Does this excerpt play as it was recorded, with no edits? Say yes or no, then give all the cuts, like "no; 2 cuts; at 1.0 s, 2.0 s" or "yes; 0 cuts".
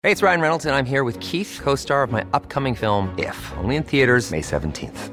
yes; 0 cuts